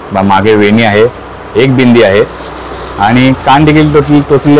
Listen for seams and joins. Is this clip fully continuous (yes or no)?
yes